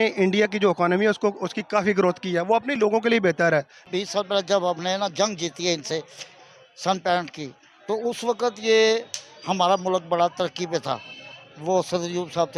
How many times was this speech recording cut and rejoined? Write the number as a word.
one